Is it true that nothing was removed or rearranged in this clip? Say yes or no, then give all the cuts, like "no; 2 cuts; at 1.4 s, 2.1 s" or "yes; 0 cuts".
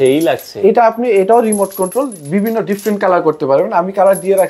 yes; 0 cuts